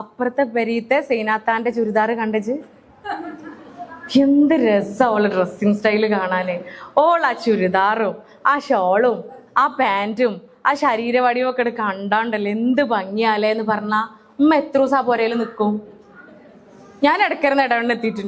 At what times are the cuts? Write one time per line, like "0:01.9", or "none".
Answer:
none